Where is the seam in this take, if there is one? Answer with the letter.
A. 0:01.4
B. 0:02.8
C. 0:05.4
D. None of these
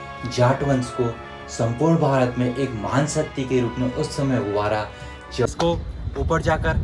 C